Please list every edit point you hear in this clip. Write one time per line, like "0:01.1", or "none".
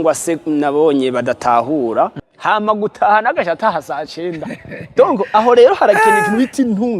0:02.2